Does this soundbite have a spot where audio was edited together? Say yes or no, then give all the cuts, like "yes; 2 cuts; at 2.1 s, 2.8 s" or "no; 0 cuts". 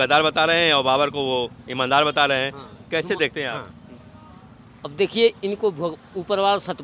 no; 0 cuts